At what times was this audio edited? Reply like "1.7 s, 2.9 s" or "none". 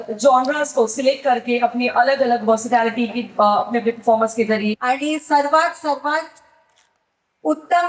4.8 s